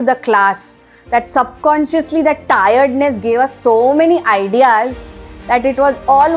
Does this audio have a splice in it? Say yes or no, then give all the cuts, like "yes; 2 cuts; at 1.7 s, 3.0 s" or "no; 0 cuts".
no; 0 cuts